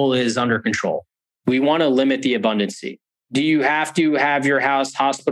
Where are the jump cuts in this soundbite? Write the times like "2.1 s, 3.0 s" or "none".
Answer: 1.1 s